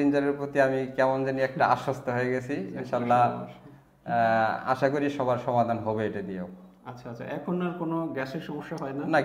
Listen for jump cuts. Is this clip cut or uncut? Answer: uncut